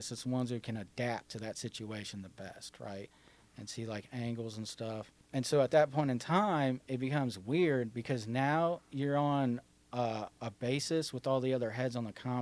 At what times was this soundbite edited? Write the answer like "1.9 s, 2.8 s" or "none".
5.2 s